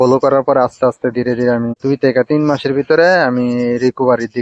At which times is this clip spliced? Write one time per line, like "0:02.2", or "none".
0:01.8

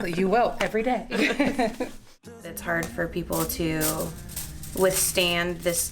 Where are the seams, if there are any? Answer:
0:02.6

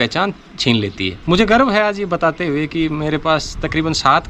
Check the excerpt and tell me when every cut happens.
0:01.1

